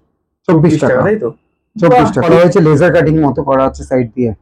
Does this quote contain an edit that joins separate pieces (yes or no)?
yes